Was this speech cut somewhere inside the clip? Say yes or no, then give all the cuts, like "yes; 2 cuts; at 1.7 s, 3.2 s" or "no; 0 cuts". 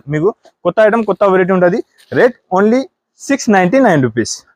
no; 0 cuts